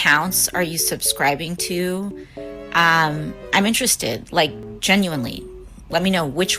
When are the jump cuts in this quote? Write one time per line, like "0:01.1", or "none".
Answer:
0:04.8